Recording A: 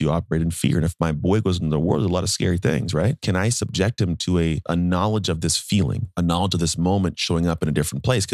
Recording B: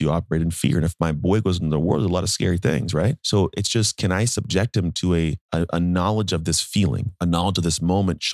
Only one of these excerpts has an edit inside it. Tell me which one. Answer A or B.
A